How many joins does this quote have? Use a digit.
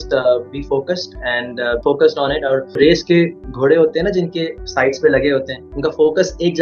2